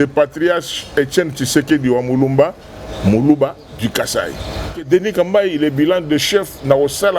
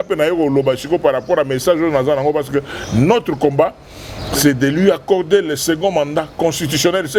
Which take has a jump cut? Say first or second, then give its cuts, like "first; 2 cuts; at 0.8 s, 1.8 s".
first; 1 cut; at 4.9 s